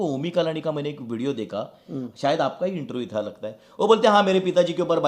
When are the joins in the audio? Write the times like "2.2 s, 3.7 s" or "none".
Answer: none